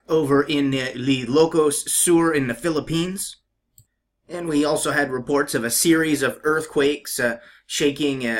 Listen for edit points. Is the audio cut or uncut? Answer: uncut